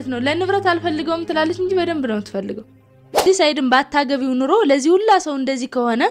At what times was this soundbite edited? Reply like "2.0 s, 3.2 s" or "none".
3.2 s